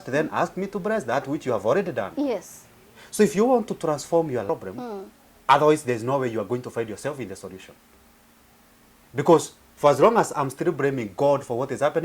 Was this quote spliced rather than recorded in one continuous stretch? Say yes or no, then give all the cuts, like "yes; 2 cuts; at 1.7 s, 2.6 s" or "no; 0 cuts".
yes; 1 cut; at 4.5 s